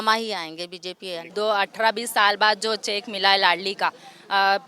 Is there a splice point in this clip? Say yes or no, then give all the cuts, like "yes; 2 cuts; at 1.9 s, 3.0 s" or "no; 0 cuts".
yes; 1 cut; at 1.2 s